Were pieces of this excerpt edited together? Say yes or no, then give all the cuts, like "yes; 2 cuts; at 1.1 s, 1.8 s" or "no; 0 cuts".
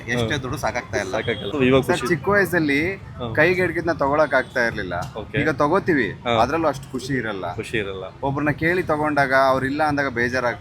yes; 1 cut; at 1.5 s